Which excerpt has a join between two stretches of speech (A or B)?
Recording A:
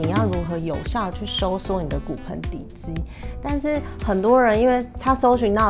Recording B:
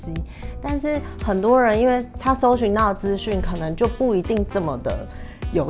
B